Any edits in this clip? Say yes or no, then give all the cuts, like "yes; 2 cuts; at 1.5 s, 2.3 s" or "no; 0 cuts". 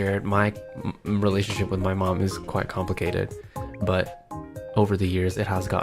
no; 0 cuts